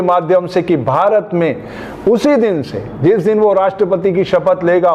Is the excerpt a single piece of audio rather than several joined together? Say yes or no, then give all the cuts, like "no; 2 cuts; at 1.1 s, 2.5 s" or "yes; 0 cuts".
yes; 0 cuts